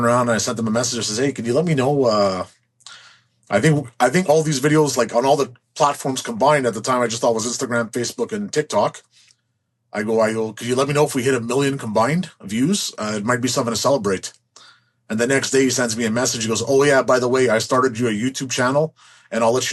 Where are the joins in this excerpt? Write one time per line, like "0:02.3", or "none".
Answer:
none

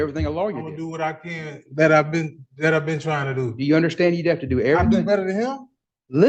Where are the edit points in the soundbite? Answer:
none

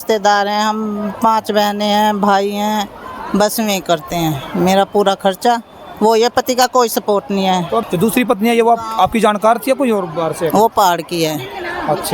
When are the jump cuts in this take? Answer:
0:07.8

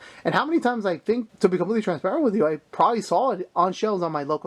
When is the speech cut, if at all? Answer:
0:01.3

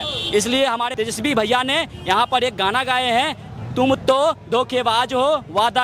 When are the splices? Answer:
0:00.9

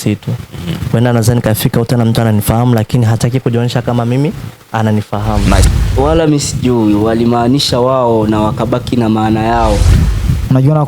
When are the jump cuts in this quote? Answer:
0:05.6
0:09.8

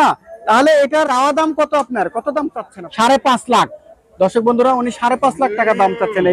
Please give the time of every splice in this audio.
0:01.1
0:02.7

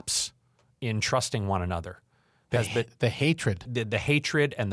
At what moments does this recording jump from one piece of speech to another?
0:03.7

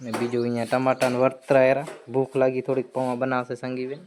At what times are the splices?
none

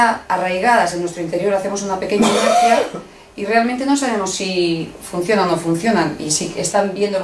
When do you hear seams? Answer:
0:05.4

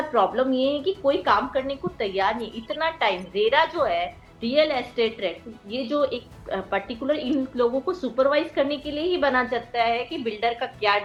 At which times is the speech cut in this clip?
none

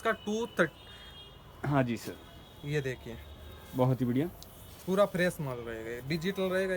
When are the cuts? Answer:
none

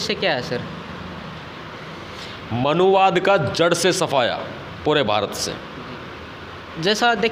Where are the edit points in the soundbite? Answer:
none

